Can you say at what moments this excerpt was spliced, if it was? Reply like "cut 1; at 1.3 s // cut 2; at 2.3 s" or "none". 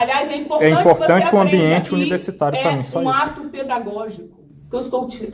cut 1; at 1.9 s